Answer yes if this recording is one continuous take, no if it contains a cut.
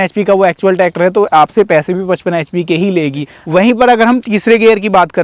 no